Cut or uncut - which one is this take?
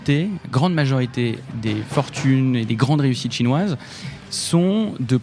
uncut